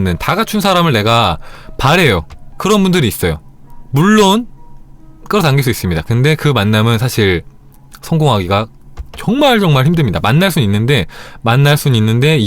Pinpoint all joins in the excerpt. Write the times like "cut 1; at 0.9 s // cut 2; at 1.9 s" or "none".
cut 1; at 2.4 s